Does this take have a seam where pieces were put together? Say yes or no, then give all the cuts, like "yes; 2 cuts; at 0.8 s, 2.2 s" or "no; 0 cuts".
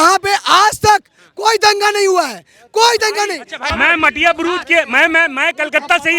yes; 1 cut; at 3.6 s